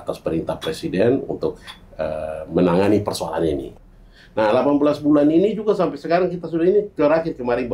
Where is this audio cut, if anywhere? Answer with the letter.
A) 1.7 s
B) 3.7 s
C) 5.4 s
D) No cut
B